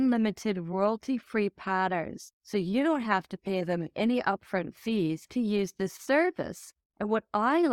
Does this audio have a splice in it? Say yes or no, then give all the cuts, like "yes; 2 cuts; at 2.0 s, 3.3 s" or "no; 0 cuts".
no; 0 cuts